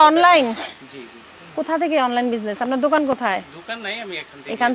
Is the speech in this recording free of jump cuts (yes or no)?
yes